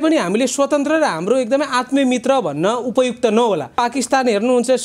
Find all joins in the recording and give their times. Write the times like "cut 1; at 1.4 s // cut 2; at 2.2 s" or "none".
cut 1; at 3.7 s